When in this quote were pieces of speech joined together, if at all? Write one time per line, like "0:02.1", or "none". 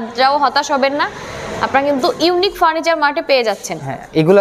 none